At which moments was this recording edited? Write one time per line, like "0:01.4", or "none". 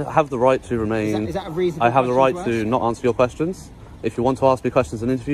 none